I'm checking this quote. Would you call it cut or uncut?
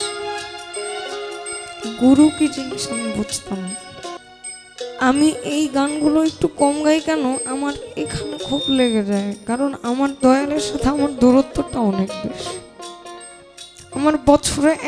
cut